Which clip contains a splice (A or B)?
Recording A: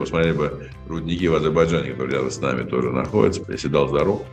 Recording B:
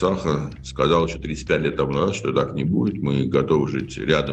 A